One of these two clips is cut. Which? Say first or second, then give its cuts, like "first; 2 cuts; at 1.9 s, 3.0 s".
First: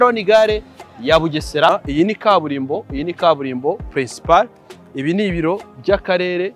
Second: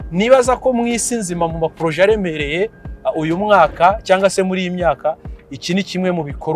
first; 1 cut; at 1.7 s